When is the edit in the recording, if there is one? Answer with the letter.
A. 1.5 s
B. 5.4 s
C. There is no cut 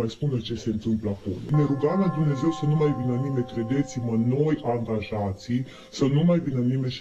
A